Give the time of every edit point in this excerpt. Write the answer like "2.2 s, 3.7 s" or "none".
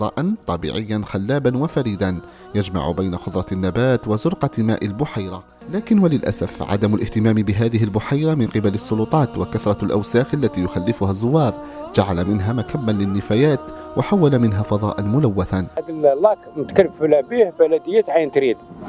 5.8 s, 15.8 s